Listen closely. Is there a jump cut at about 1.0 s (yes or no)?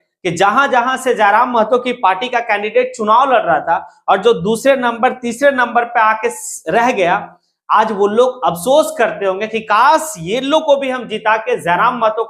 no